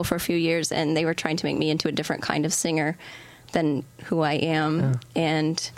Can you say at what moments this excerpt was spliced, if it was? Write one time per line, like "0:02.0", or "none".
none